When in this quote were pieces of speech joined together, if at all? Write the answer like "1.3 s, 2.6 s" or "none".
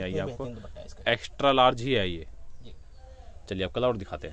none